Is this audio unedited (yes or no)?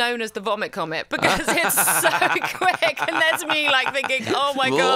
yes